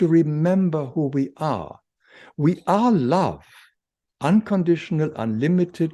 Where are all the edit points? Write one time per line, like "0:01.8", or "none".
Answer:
none

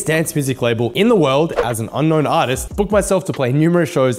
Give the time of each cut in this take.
0:00.9
0:02.6

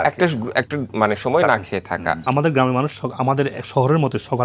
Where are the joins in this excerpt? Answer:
0:02.2

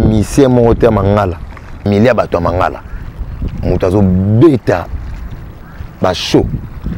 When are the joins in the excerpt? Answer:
0:01.8

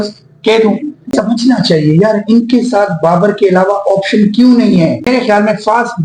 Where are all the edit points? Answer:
0:01.1
0:05.1

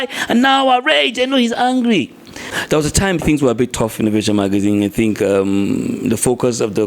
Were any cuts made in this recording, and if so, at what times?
0:02.4

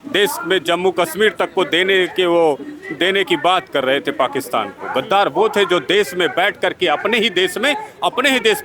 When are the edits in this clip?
none

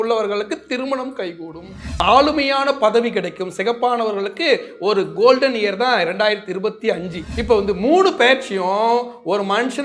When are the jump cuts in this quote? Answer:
0:02.0
0:07.2

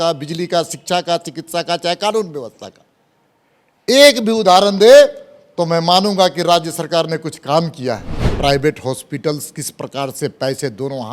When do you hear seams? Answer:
0:08.2

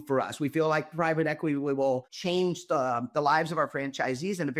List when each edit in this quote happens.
0:02.1

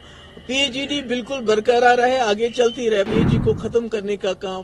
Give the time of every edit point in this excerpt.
0:03.1

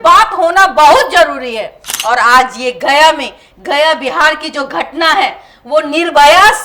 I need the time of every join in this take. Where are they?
0:01.8

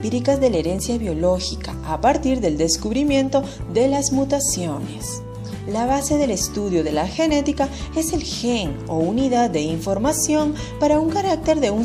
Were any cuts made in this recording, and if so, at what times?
none

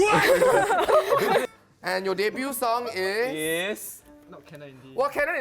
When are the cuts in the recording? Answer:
0:01.4

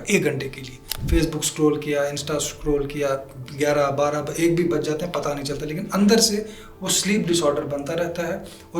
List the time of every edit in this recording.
0:00.9

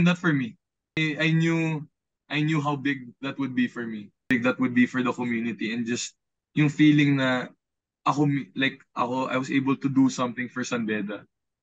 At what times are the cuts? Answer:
0:01.0
0:04.3

